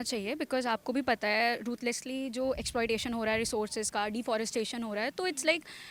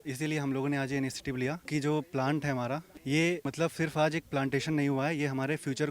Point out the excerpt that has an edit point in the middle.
second; 3 cuts; at 1.6 s, 2.9 s, 3.5 s

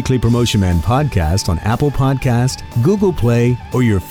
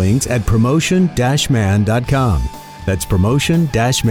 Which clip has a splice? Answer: first; 1 cut; at 2.7 s

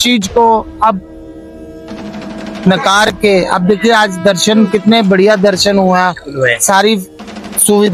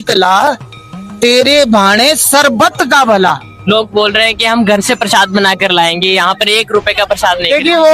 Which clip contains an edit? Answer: second; 1 cut; at 3.5 s

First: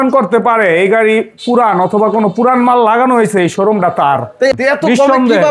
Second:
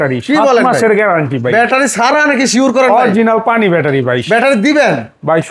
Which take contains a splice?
first; 1 cut; at 4.6 s

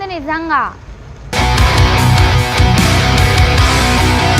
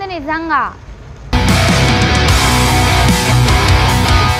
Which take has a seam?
first; 1 cut; at 1.3 s

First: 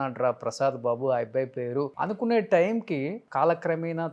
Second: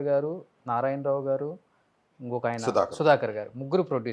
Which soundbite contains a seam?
first; 2 cuts; at 1.9 s, 3.2 s

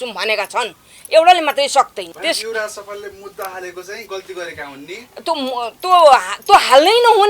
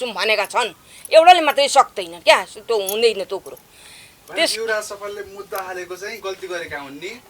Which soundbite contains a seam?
first; 1 cut; at 2.0 s

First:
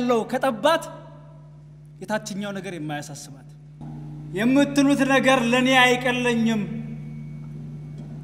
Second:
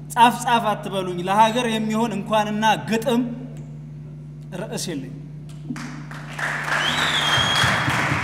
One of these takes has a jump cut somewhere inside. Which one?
first; 1 cut; at 3.7 s

